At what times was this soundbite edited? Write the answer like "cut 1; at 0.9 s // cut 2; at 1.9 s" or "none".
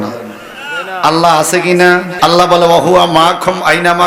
cut 1; at 2.1 s